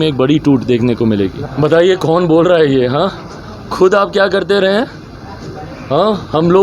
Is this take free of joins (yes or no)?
no